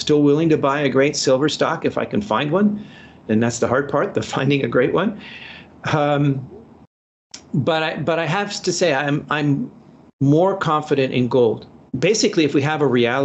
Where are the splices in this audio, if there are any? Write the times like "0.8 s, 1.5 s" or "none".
11.8 s